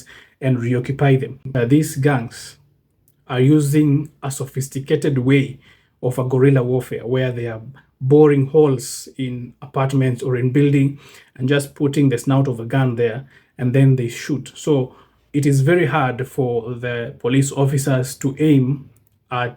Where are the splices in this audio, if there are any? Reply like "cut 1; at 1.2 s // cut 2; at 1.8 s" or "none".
cut 1; at 1.4 s